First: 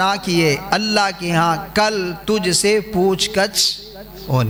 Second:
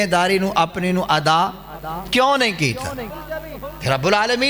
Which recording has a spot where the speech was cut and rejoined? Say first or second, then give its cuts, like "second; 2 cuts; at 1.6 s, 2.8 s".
second; 1 cut; at 3.2 s